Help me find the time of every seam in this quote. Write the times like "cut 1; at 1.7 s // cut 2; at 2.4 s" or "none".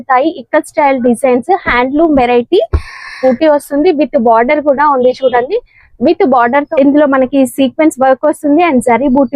cut 1; at 3.2 s // cut 2; at 6.7 s